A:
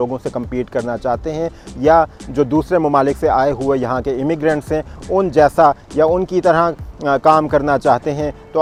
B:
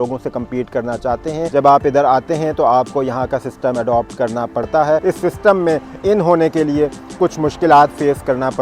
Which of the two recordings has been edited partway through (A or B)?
B